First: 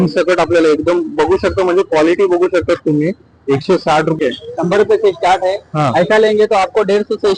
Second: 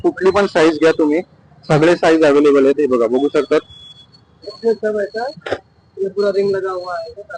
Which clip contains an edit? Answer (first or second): first